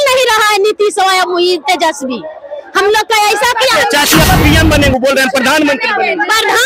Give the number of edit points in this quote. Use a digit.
1